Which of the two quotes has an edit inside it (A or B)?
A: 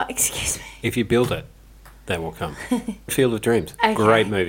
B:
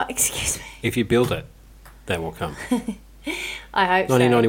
A